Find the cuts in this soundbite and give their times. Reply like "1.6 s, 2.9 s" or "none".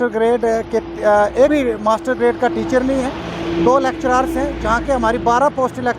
1.5 s